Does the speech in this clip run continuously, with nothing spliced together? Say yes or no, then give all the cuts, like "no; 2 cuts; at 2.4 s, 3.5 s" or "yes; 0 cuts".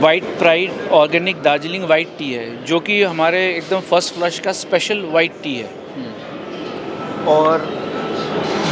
yes; 0 cuts